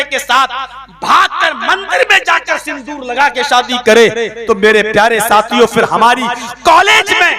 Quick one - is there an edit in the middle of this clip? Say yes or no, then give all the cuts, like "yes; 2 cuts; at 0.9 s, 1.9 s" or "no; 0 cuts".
no; 0 cuts